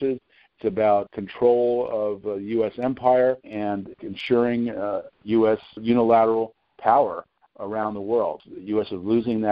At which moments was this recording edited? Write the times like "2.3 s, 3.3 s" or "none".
1.1 s, 3.9 s, 5.8 s, 8.5 s